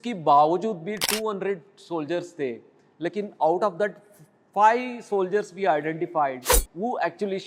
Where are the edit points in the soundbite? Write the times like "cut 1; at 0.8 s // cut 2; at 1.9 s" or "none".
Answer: none